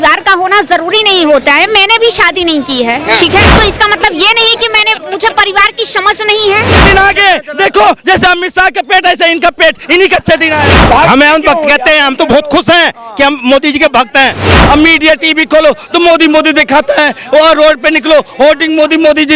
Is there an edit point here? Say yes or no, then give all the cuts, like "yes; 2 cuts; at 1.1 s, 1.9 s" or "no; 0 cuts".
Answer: yes; 4 cuts; at 3.5 s, 6.7 s, 10.7 s, 14.6 s